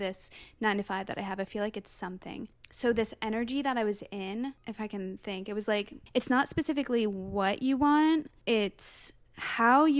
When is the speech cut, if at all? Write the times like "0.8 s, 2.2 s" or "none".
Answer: none